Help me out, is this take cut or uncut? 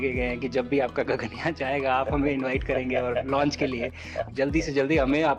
cut